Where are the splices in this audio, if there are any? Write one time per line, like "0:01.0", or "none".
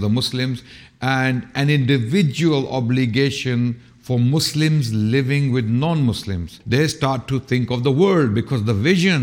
0:06.5